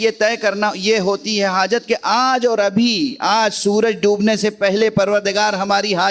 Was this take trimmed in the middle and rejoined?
no; 0 cuts

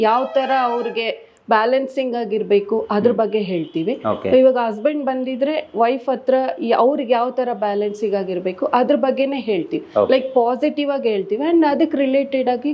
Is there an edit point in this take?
no; 0 cuts

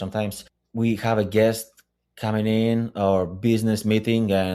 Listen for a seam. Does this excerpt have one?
no; 0 cuts

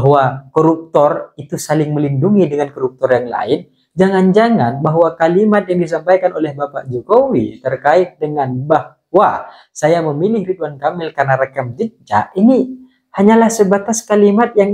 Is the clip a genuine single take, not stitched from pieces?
yes; 0 cuts

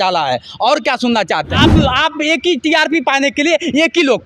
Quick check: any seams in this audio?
yes; 1 cut; at 1.6 s

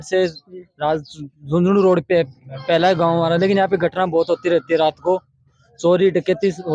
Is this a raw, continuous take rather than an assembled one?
yes; 0 cuts

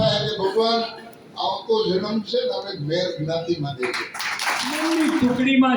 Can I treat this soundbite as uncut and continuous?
no; 1 cut; at 4.8 s

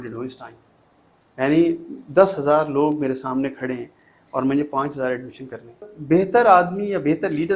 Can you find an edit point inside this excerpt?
yes; 1 cut; at 5.9 s

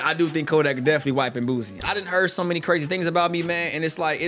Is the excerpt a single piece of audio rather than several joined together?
no; 1 cut; at 1.8 s

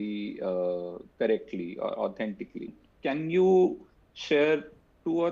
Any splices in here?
yes; 1 cut; at 2.8 s

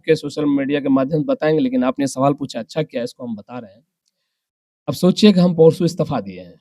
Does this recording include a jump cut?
no; 0 cuts

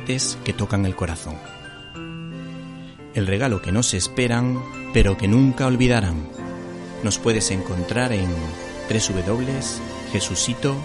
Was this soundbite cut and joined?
no; 0 cuts

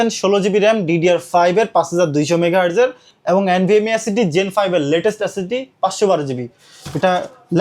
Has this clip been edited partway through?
yes; 1 cut; at 6.7 s

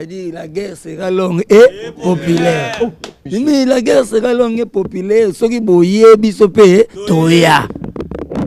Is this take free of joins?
no; 1 cut; at 3.2 s

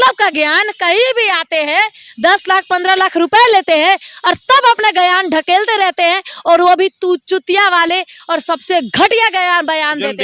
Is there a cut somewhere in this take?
no; 0 cuts

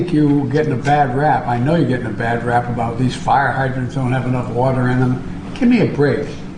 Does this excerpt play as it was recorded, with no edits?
yes; 0 cuts

